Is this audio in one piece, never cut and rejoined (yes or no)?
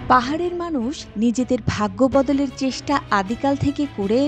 yes